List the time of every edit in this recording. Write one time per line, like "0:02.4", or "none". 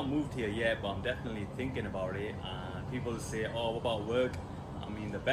none